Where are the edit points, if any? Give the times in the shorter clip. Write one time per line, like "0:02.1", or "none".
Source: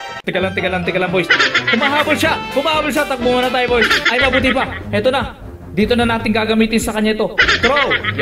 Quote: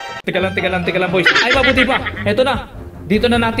0:01.3